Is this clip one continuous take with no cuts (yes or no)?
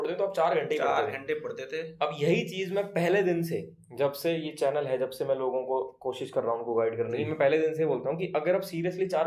yes